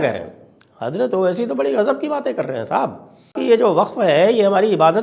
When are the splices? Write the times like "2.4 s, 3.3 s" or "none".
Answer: 3.4 s